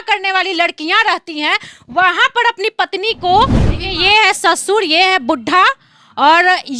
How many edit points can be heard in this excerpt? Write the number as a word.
one